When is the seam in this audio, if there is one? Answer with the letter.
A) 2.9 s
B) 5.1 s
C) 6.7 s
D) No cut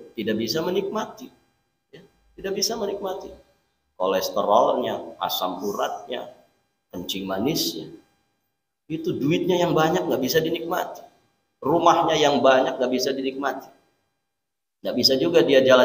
D